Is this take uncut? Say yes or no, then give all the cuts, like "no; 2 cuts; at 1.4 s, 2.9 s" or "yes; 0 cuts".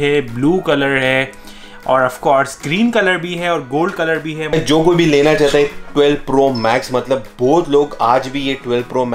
no; 1 cut; at 4.4 s